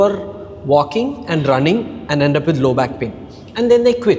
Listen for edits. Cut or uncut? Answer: uncut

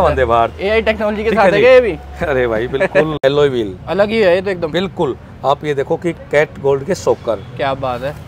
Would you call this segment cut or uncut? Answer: cut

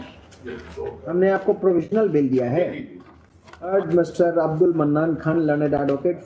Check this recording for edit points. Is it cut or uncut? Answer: cut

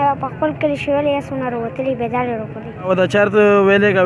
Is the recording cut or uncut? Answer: cut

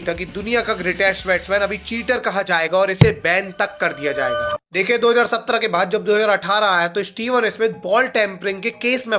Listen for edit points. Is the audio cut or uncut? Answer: uncut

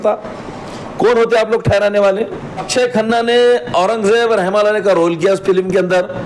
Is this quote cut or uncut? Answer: cut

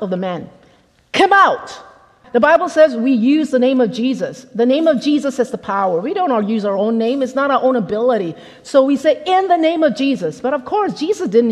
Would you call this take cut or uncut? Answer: cut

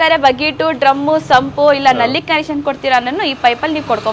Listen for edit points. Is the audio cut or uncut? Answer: uncut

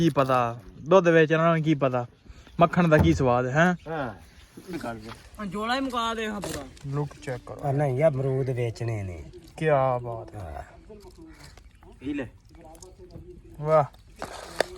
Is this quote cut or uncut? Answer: cut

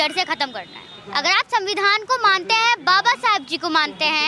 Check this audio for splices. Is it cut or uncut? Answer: cut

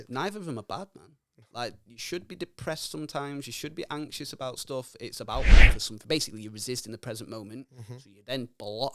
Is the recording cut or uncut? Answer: cut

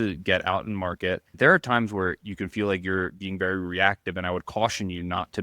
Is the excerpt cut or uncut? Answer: cut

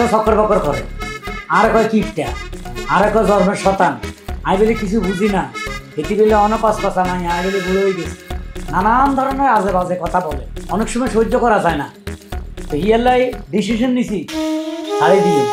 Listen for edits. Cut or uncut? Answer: uncut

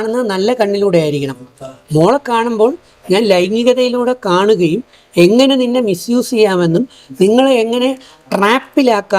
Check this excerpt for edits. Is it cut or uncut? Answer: uncut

